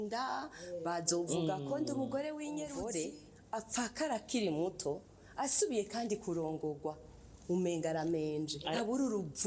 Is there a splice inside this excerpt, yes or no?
yes